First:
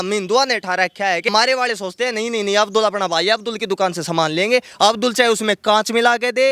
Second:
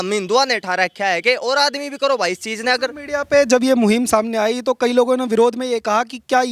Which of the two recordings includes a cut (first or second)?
first